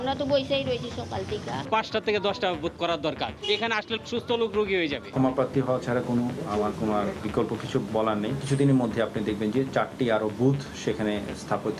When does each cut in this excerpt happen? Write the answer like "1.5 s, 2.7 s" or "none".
1.6 s, 5.0 s

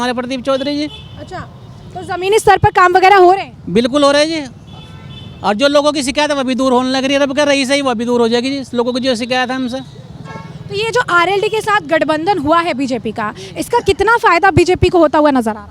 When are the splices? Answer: none

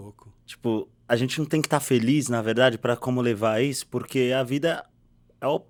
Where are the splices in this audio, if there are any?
none

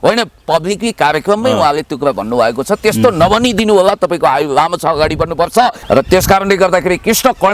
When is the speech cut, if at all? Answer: 5.8 s

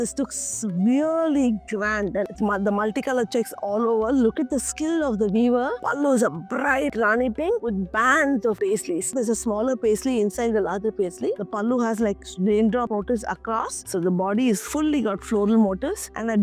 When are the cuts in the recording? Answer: 2.3 s, 5.8 s, 9.1 s, 11.4 s, 13.8 s

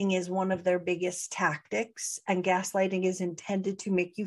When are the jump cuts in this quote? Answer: none

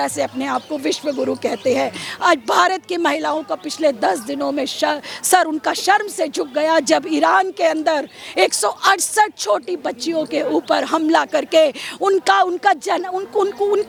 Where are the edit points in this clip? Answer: none

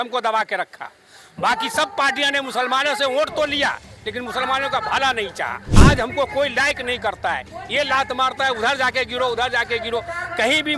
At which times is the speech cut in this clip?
5.6 s

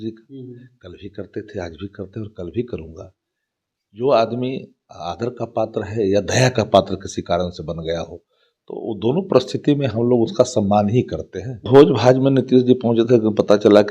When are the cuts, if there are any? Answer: 11.7 s

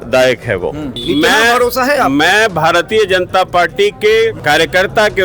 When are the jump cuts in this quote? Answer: 0.9 s, 4.4 s

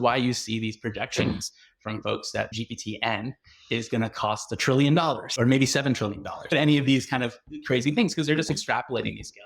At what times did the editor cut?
2.5 s, 5.3 s, 6.5 s

